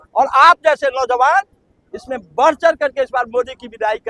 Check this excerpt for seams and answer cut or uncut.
uncut